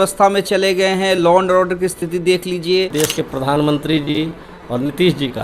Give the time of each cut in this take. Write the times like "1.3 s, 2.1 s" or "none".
2.9 s